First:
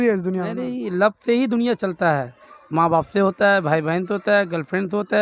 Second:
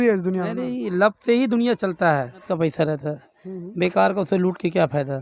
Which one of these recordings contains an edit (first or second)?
second